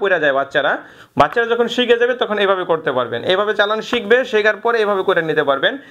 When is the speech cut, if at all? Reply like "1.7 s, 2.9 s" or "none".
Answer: none